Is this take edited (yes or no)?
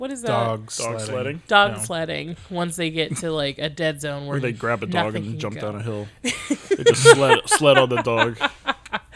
no